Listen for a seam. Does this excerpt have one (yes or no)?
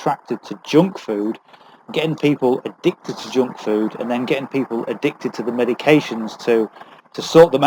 no